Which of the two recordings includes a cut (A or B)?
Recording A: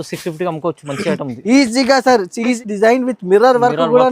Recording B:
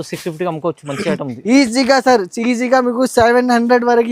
A